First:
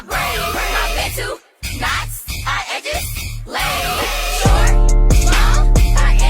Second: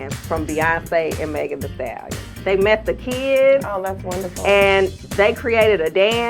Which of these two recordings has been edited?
second; 2 cuts; at 2.3 s, 5.0 s

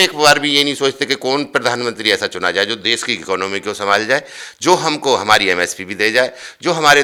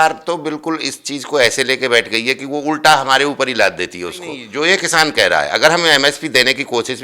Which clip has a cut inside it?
second; 1 cut; at 4.4 s

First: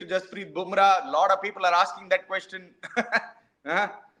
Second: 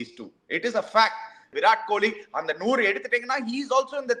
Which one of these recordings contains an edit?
second; 1 cut; at 1.5 s

